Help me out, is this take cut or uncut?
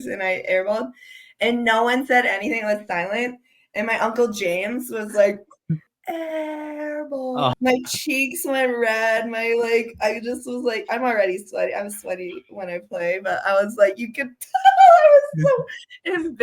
cut